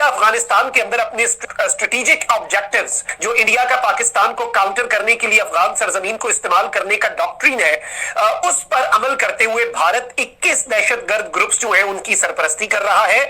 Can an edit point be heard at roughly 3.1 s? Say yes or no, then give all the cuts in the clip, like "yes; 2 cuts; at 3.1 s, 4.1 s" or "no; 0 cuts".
yes; 2 cuts; at 1.4 s, 3.1 s